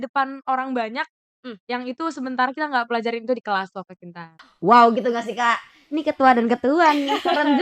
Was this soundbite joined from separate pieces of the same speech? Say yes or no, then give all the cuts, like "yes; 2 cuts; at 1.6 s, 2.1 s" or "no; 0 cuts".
yes; 1 cut; at 4.5 s